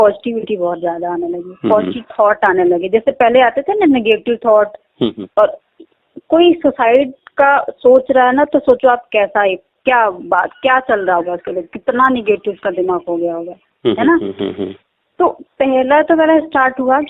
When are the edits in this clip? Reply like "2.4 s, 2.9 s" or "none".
none

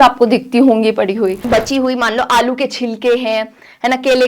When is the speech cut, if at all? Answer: 1.4 s

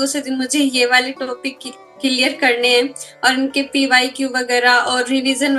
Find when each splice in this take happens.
none

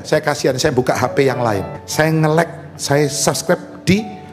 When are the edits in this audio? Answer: 1.8 s

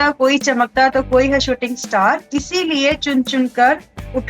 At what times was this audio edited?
2.2 s

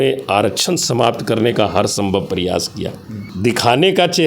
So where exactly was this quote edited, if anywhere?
3.2 s

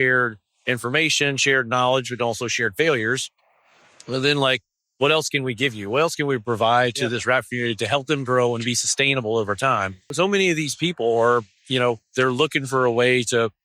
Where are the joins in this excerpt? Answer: 10.1 s

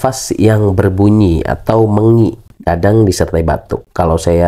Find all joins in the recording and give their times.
none

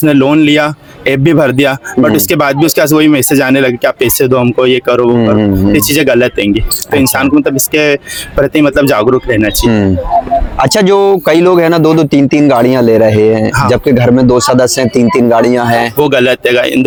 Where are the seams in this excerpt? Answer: none

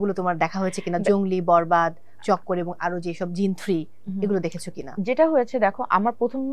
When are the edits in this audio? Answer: none

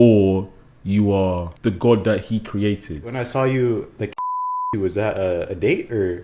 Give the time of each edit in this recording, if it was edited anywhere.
1.5 s, 3.1 s

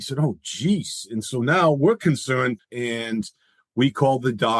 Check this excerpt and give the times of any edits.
2.6 s

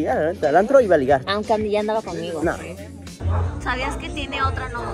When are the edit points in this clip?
3.2 s

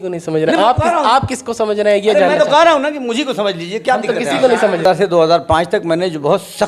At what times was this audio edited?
4.8 s

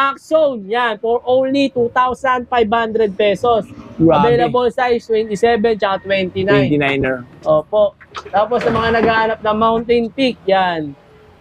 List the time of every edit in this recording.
none

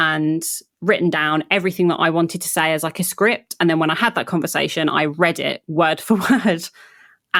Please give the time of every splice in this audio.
none

